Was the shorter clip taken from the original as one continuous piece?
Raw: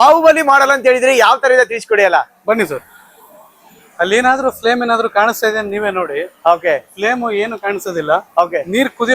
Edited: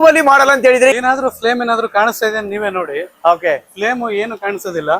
no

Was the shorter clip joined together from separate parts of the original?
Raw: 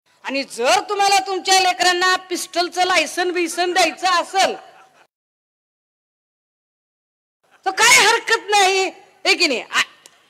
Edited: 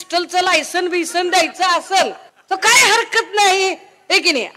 yes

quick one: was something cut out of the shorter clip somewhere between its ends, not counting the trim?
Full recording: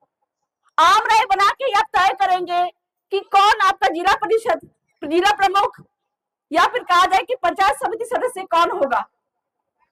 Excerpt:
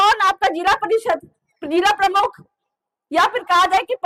no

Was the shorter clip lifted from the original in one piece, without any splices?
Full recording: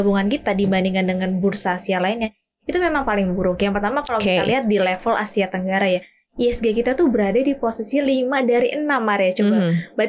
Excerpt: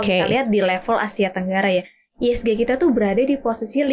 yes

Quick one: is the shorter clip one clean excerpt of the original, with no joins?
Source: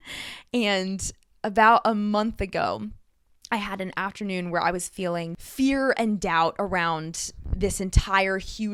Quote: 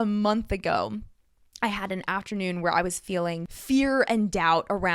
yes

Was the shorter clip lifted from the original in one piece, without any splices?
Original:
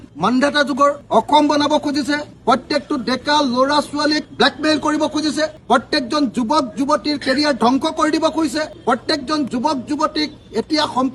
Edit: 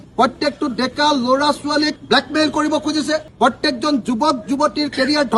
yes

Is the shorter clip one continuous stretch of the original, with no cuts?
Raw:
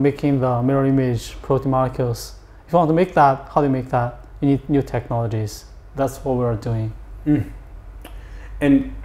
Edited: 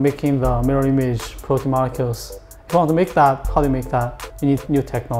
yes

